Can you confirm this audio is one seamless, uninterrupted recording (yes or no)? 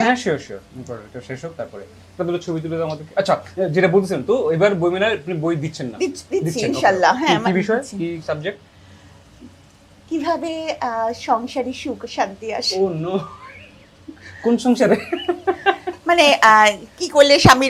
yes